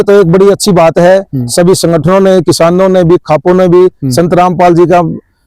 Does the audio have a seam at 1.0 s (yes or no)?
no